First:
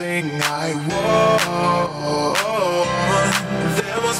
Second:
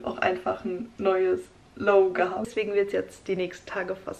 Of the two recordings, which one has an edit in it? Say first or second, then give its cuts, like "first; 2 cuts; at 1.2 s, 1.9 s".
second; 1 cut; at 2.5 s